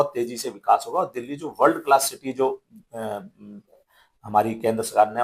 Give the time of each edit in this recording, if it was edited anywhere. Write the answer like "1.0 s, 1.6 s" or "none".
none